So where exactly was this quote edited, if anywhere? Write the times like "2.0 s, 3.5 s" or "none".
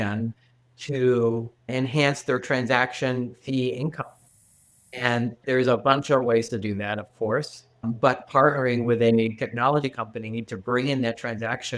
1.7 s, 5.4 s